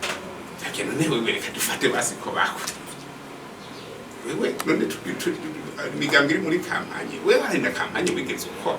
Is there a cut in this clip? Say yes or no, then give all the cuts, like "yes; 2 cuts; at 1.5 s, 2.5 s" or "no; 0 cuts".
no; 0 cuts